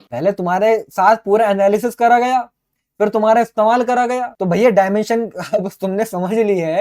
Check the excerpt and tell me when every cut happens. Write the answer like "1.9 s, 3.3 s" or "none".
4.3 s